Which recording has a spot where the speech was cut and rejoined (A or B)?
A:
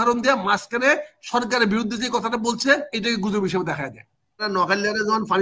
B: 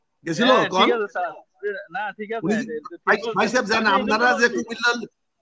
A